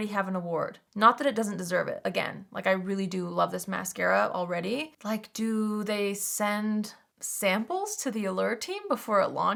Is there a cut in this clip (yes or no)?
no